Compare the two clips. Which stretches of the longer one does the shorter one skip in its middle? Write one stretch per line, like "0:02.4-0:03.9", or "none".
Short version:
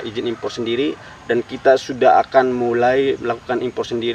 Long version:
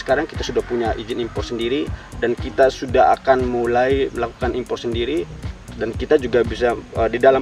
none